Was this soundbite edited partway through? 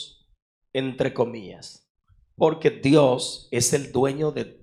no; 0 cuts

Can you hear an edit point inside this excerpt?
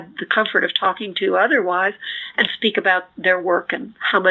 no; 0 cuts

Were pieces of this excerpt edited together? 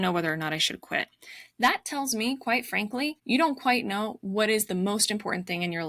yes; 1 cut; at 3.2 s

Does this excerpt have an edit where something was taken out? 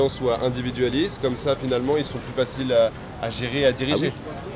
no; 0 cuts

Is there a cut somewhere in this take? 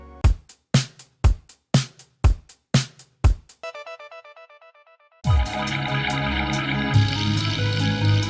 yes; 1 cut; at 3.6 s

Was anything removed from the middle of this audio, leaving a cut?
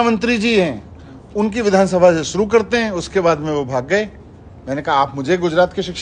no; 0 cuts

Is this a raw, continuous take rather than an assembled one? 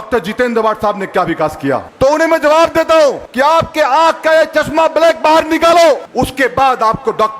no; 3 cuts; at 1.9 s, 3.2 s, 6.1 s

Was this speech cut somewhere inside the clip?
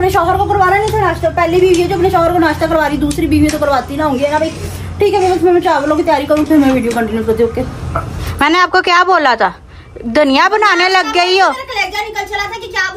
no; 0 cuts

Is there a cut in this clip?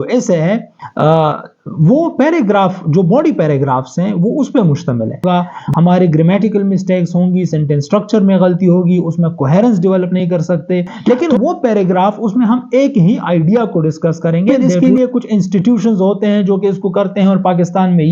yes; 3 cuts; at 5.2 s, 10.9 s, 14.6 s

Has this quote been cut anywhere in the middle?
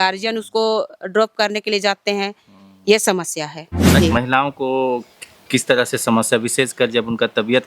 yes; 1 cut; at 4.0 s

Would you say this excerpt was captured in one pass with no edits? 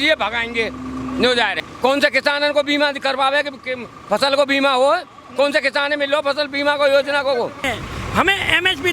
no; 2 cuts; at 1.7 s, 7.7 s

